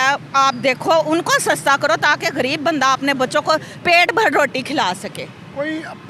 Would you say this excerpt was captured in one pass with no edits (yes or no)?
yes